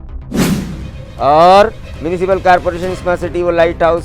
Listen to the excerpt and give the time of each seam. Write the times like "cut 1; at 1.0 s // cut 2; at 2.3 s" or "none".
cut 1; at 1.0 s